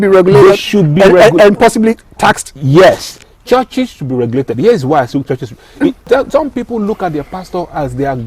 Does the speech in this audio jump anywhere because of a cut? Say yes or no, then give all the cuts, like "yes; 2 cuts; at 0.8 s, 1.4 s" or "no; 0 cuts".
yes; 1 cut; at 6.0 s